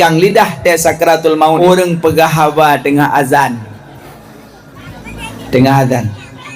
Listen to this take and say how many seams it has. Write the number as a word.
one